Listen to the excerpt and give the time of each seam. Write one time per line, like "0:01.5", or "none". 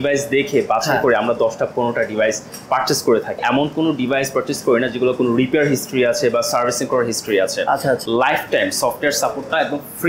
0:03.4
0:08.0